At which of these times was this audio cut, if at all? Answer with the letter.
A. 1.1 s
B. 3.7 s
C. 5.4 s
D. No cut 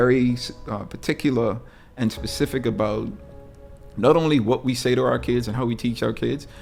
D